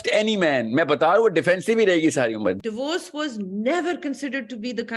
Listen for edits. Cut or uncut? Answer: cut